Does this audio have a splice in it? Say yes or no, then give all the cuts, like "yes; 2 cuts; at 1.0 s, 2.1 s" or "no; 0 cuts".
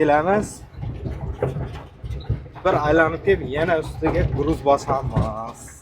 no; 0 cuts